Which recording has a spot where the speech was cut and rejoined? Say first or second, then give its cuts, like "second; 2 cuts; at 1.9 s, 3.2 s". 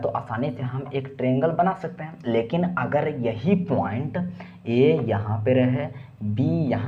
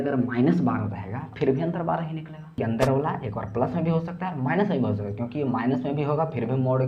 second; 1 cut; at 2.6 s